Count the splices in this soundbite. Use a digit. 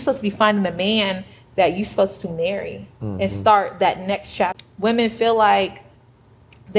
1